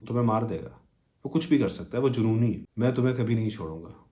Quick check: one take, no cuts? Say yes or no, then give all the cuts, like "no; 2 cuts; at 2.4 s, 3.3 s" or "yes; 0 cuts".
no; 1 cut; at 2.6 s